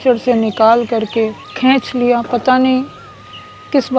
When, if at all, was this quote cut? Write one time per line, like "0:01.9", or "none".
0:01.5